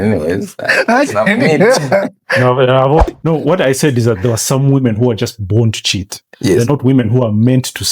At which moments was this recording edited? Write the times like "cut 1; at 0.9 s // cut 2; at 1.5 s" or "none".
cut 1; at 3.1 s